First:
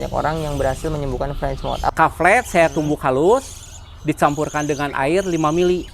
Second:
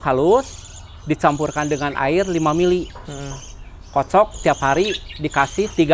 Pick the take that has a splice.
first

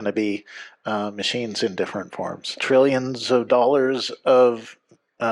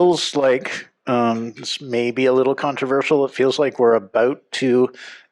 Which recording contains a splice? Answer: first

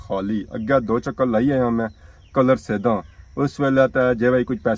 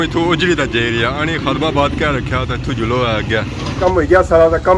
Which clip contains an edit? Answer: second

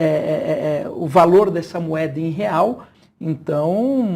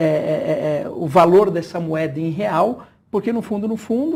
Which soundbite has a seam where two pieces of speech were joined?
first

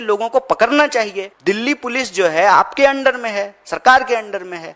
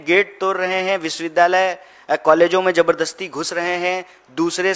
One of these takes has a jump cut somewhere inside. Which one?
first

